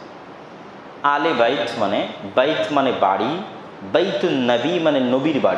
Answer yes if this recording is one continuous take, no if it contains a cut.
yes